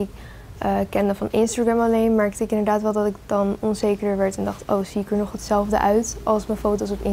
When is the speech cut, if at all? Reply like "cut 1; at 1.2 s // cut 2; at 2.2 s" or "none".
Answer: none